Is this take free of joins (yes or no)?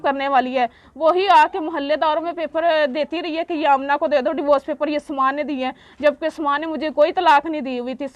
yes